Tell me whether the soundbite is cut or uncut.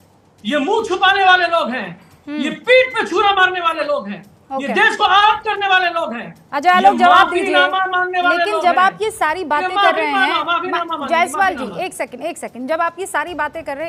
uncut